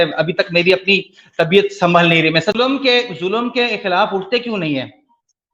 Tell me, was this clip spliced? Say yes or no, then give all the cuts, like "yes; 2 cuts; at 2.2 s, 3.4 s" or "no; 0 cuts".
yes; 1 cut; at 2.7 s